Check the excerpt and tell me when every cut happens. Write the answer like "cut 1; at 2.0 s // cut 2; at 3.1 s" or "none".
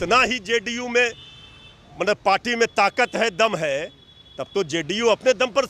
none